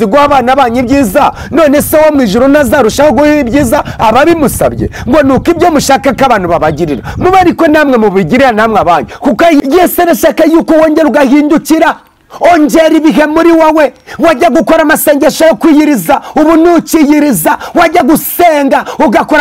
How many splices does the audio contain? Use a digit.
1